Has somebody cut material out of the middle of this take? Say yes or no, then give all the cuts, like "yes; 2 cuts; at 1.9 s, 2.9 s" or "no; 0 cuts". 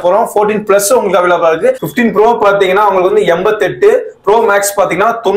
yes; 1 cut; at 1.9 s